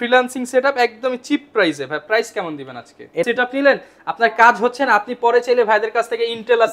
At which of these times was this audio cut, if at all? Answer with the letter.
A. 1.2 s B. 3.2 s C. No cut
B